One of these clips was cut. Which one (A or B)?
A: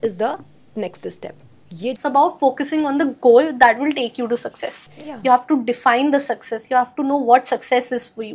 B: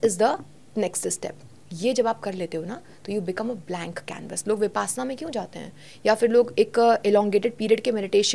A